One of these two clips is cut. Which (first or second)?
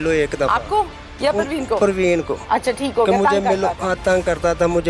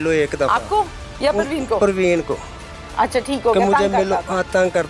first